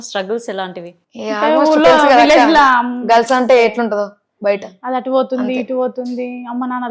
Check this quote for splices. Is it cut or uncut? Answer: uncut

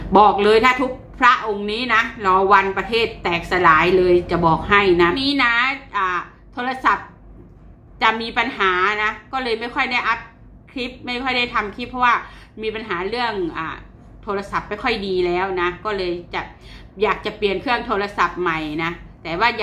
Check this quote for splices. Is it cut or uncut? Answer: cut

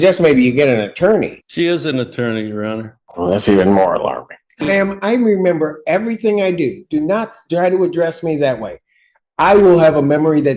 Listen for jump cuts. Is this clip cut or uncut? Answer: cut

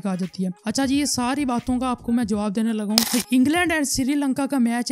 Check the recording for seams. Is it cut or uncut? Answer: cut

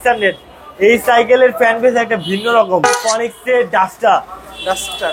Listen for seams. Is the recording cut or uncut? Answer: cut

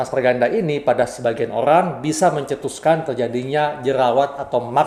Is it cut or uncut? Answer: uncut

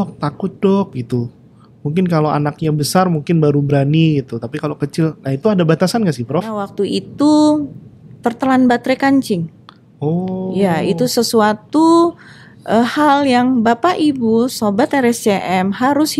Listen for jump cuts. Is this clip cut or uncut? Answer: cut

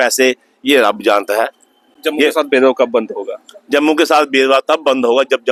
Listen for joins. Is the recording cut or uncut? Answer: uncut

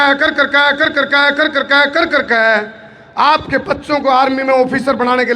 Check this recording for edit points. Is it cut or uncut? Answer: uncut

